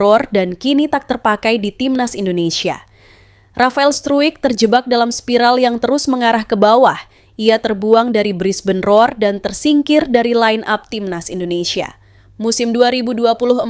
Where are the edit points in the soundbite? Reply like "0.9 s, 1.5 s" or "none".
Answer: none